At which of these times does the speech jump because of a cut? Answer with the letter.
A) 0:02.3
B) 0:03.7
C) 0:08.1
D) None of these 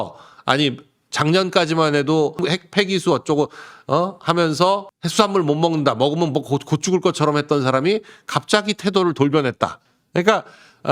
A